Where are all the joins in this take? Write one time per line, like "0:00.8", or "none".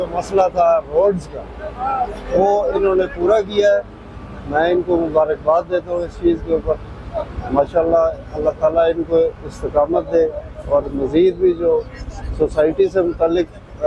none